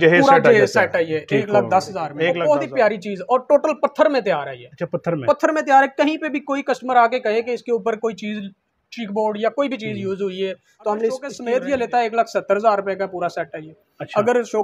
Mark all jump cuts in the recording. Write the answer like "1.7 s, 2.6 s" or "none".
2.2 s, 11.3 s